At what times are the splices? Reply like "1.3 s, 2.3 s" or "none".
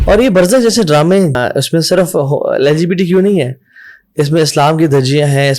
1.4 s